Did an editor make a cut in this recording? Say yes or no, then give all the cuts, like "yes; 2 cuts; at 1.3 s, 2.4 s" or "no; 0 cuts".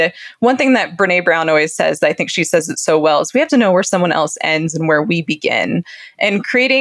no; 0 cuts